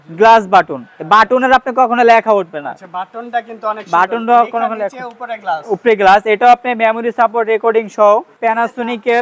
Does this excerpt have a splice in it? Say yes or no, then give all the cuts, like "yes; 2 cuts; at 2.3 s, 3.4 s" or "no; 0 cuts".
yes; 1 cut; at 8.3 s